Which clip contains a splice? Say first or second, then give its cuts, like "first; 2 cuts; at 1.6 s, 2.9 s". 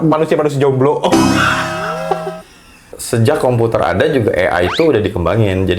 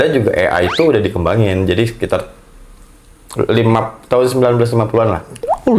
first; 1 cut; at 2.9 s